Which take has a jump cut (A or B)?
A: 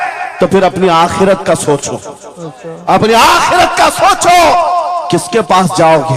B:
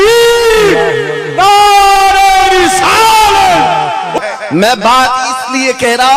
B